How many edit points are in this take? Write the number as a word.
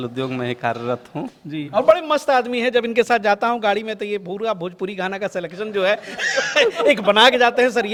zero